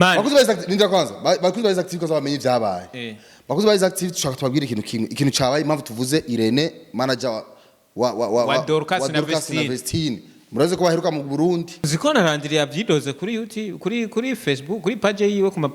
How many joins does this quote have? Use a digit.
1